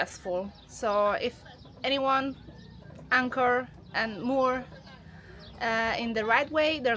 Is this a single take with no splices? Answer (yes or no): yes